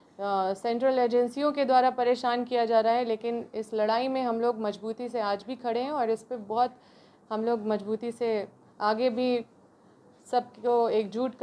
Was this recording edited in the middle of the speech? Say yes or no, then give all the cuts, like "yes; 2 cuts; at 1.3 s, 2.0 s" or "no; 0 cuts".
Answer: no; 0 cuts